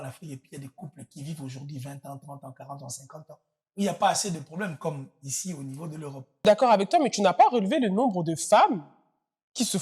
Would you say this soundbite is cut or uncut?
cut